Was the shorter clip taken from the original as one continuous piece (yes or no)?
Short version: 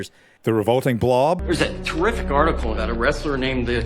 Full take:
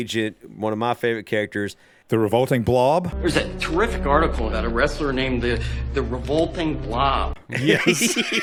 no